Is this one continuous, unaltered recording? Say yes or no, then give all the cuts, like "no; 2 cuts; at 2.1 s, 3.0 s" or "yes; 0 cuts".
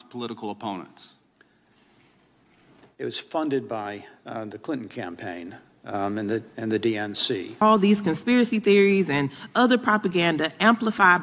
no; 1 cut; at 7.6 s